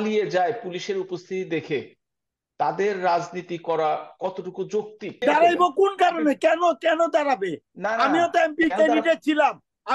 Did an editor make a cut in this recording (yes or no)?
yes